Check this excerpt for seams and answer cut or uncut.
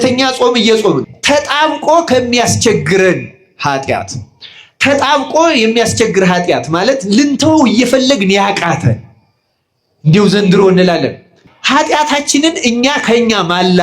cut